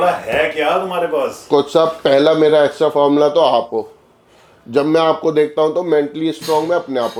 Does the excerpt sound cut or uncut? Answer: uncut